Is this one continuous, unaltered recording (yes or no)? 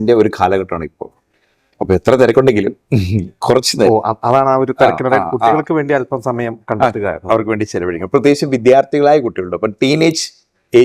yes